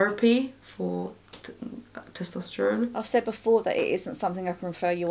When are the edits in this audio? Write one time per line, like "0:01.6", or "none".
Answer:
0:02.9